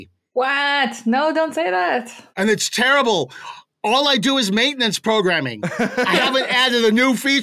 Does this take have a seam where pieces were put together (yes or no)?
no